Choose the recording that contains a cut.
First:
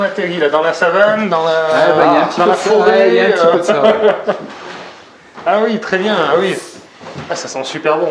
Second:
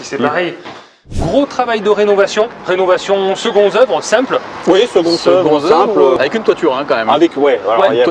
second; 3 cuts; at 1.1 s, 2.6 s, 6.2 s

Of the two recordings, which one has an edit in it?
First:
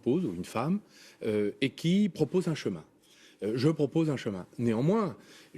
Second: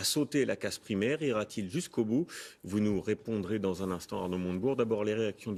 first; 1 cut; at 1.2 s

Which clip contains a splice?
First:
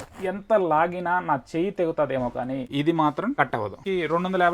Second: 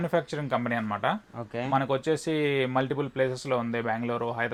first; 2 cuts; at 2.7 s, 3.7 s

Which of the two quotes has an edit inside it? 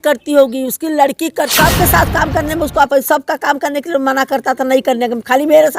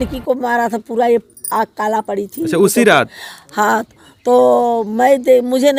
first; 1 cut; at 1.5 s

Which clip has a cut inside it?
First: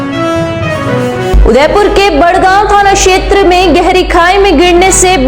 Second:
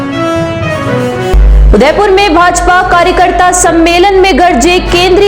first; 1 cut; at 1.1 s

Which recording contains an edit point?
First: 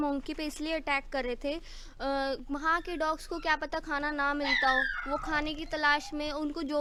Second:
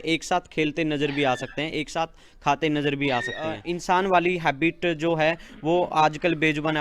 second; 1 cut; at 3.7 s

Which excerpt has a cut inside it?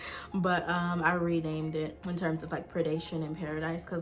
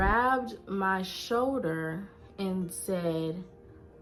first; 1 cut; at 2.0 s

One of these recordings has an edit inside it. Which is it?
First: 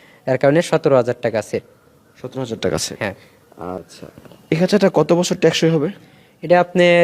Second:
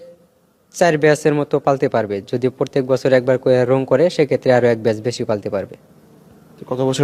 first; 1 cut; at 3.9 s

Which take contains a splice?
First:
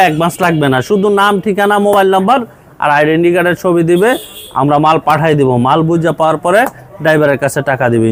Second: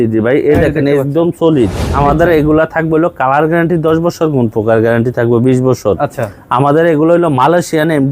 second; 1 cut; at 1.9 s

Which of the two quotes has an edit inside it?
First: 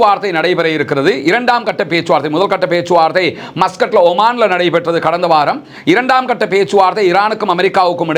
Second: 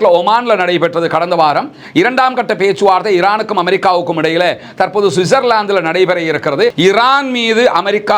second; 1 cut; at 6.7 s

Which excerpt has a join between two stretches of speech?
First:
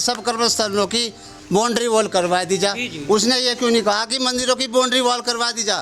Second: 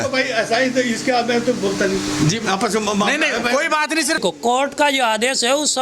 second; 1 cut; at 4.2 s

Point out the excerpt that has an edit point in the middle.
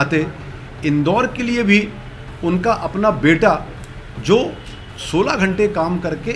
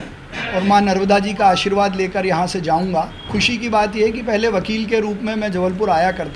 second; 1 cut; at 3.3 s

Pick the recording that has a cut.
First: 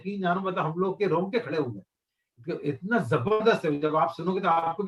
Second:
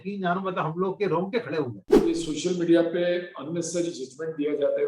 second; 1 cut; at 1.8 s

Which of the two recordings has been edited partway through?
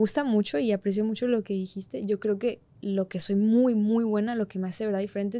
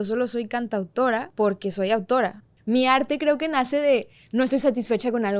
second; 2 cuts; at 1.3 s, 2.5 s

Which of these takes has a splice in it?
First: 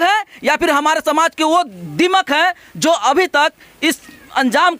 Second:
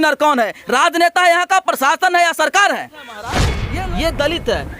second; 1 cut; at 3.5 s

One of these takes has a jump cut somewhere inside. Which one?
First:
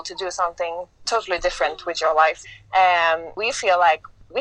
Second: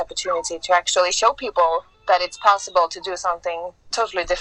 first; 2 cuts; at 2.5 s, 3.4 s

